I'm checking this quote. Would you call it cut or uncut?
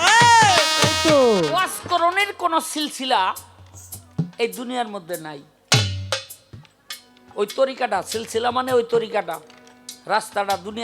cut